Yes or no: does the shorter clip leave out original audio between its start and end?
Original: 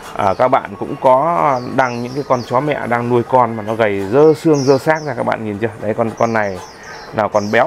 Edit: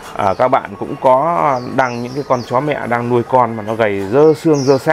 no